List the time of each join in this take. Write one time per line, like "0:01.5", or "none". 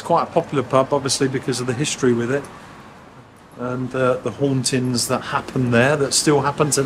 none